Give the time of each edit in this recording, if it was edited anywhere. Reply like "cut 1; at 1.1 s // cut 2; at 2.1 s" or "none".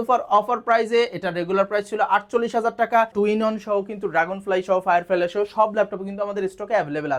cut 1; at 3.1 s

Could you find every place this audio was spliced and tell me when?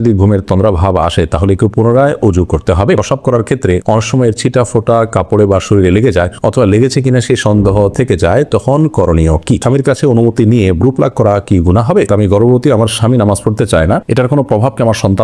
cut 1; at 3.0 s // cut 2; at 9.6 s // cut 3; at 12.1 s

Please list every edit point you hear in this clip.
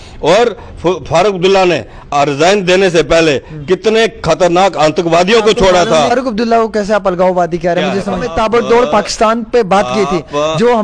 cut 1; at 6.1 s // cut 2; at 8.3 s

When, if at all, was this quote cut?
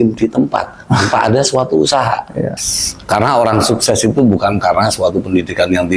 cut 1; at 2.5 s

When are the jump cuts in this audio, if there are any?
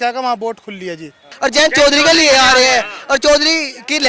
cut 1; at 1.3 s

